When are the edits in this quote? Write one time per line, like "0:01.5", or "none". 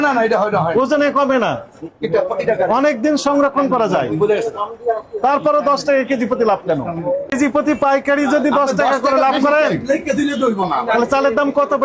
0:07.3